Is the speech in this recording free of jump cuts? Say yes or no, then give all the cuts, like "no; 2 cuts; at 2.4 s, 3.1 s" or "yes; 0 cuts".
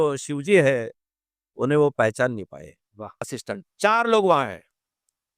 no; 1 cut; at 3.3 s